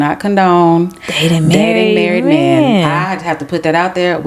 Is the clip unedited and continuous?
yes; 0 cuts

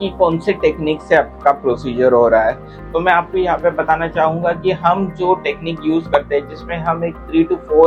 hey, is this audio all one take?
yes; 0 cuts

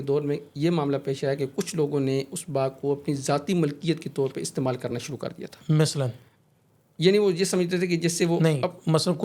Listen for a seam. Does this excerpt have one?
no; 0 cuts

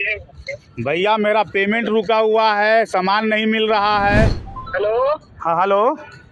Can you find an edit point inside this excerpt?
yes; 1 cut; at 4.4 s

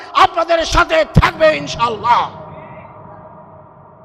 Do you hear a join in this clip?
no; 0 cuts

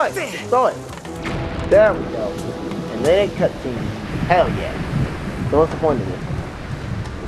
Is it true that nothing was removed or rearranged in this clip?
no; 1 cut; at 6.1 s

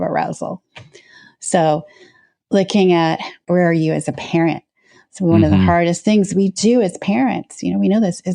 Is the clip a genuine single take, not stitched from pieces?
no; 1 cut; at 3.5 s

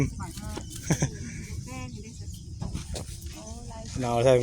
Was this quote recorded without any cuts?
no; 1 cut; at 2.6 s

